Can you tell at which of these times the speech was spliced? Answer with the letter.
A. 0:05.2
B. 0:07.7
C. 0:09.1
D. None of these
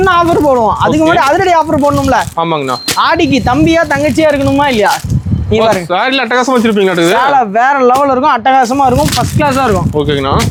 D